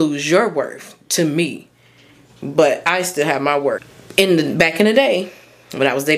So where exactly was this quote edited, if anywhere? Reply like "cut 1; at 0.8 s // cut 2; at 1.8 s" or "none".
cut 1; at 3.9 s

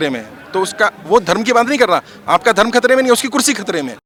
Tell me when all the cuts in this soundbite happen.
none

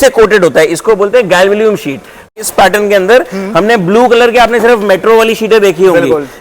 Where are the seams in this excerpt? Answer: cut 1; at 2.3 s

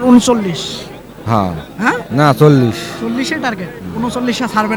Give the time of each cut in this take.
none

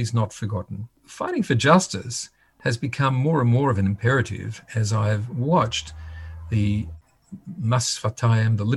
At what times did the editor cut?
cut 1; at 1.0 s

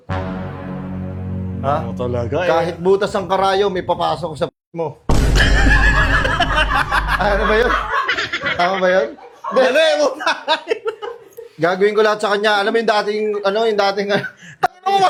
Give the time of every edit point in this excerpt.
none

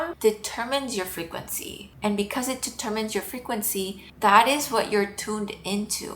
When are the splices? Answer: cut 1; at 2.0 s

